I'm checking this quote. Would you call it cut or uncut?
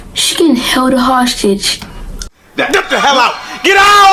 uncut